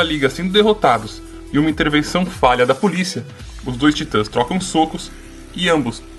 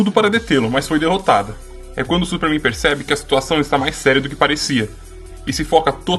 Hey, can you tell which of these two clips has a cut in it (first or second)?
second